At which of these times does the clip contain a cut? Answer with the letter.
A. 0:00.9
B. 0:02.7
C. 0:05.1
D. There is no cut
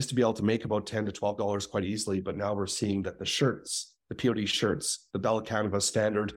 D